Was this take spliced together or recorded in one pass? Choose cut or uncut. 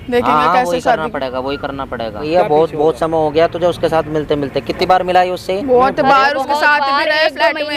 cut